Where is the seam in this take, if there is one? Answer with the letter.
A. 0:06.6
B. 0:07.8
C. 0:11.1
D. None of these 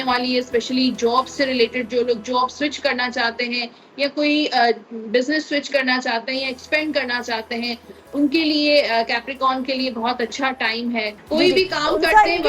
C